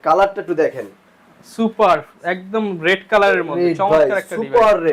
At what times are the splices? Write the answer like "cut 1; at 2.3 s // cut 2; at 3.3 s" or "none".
none